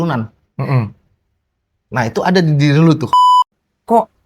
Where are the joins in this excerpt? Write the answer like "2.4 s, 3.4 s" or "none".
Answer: 3.2 s